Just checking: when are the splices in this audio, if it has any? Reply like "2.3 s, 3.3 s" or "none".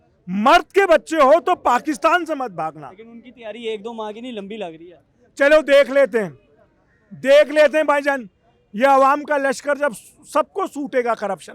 none

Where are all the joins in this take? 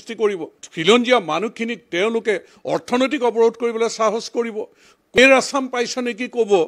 5.2 s

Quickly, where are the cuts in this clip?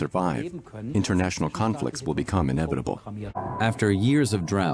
3.4 s

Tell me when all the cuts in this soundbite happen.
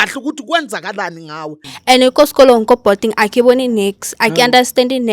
1.7 s

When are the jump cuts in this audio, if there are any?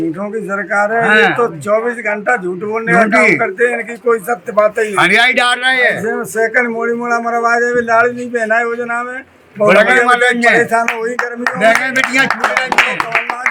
none

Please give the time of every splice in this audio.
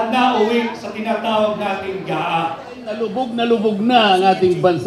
3.0 s

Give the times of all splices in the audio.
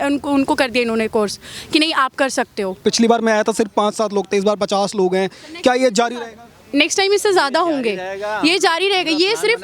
2.8 s

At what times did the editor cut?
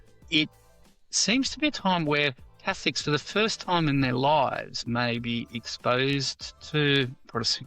none

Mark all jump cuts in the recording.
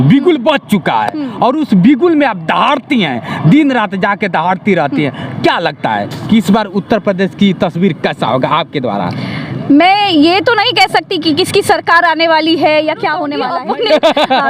13.5 s

